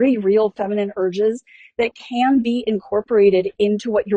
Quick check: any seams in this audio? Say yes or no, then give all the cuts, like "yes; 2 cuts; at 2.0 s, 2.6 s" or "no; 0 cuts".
no; 0 cuts